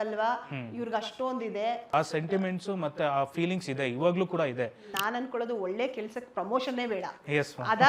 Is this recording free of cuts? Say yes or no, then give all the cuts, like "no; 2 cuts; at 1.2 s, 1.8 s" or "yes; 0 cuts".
no; 2 cuts; at 1.9 s, 4.9 s